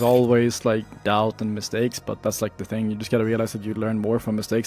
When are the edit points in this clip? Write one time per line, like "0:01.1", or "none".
0:00.9